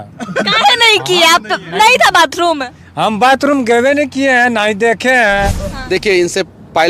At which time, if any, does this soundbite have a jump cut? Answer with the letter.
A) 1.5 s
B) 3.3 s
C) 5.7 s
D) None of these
C